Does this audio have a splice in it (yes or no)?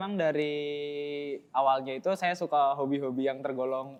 no